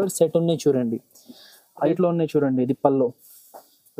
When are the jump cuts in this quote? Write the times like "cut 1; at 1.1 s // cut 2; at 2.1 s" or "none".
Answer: cut 1; at 1.9 s